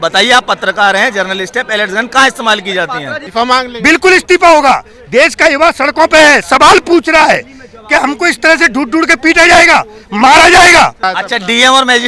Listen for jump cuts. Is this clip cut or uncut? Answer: cut